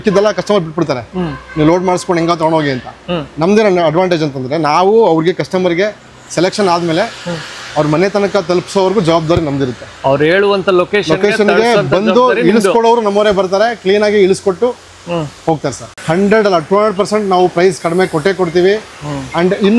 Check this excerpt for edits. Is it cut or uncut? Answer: cut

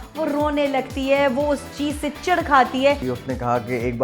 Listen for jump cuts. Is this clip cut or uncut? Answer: cut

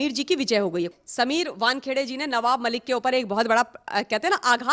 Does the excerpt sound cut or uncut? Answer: cut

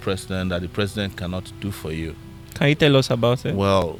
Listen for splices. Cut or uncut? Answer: uncut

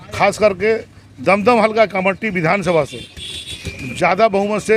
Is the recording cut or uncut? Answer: uncut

